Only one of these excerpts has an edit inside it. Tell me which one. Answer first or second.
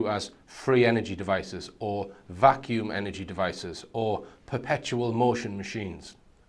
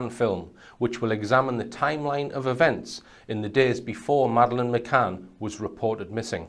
second